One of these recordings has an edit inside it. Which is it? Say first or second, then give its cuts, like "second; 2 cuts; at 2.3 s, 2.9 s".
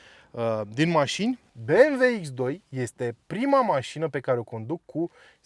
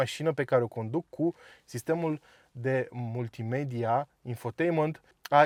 first; 1 cut; at 1.5 s